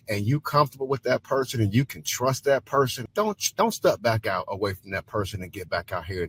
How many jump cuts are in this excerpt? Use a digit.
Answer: 1